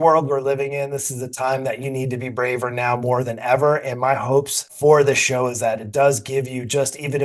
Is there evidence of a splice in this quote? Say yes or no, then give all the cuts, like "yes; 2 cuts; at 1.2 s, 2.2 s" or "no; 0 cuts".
no; 0 cuts